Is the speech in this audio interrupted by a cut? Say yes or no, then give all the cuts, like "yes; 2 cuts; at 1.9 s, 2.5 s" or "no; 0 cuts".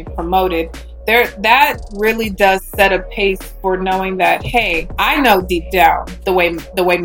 yes; 2 cuts; at 4.8 s, 6.1 s